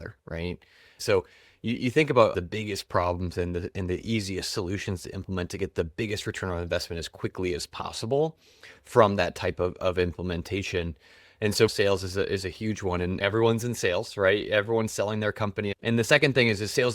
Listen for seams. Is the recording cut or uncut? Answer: cut